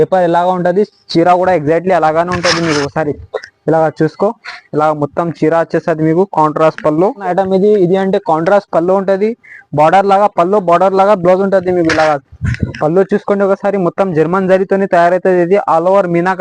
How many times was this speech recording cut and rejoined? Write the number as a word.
one